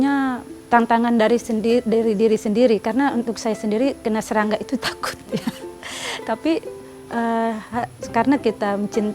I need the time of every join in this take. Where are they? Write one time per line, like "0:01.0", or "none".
none